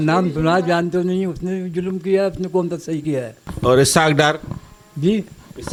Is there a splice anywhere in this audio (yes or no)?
no